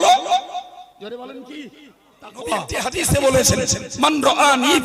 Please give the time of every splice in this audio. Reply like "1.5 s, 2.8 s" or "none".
2.8 s